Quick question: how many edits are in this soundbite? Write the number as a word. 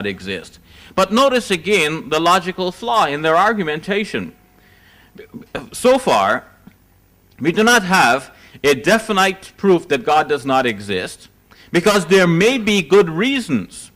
one